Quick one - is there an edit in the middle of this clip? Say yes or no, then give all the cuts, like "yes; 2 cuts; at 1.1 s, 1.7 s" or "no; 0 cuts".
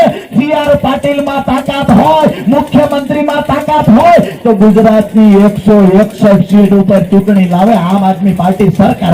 no; 0 cuts